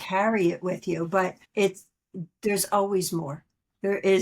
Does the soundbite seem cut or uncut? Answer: cut